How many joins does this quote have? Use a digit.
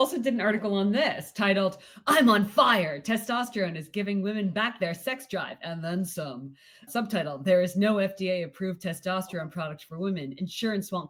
0